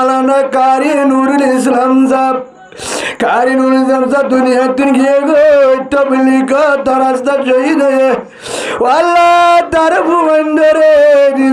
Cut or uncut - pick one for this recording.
uncut